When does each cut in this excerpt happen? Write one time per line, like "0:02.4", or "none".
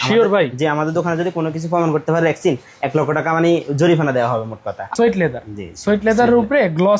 0:04.9

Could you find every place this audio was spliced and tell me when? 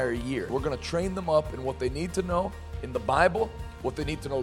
none

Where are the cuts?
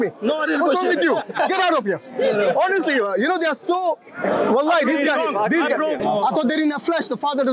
0:06.0

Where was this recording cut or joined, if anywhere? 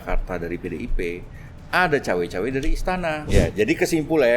0:03.2

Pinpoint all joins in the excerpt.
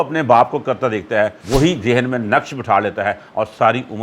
0:01.4

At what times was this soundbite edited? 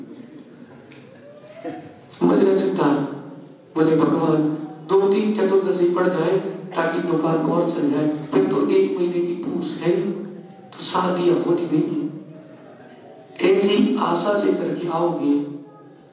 0:11.3

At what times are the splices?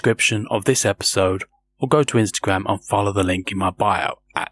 none

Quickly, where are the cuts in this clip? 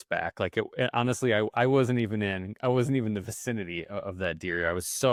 none

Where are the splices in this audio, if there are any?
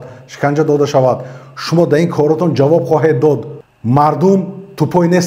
0:03.5

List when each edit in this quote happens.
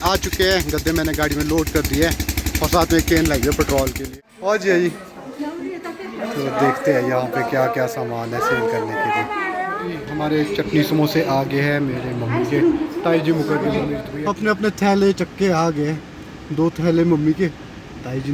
0:04.0
0:10.0
0:14.1

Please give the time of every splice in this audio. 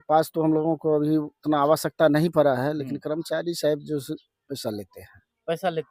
none

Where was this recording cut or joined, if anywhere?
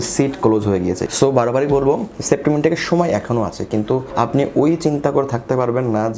0:01.0

